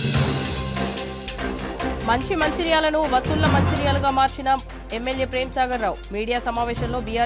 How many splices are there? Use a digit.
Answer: 1